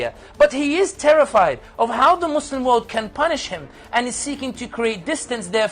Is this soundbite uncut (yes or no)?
yes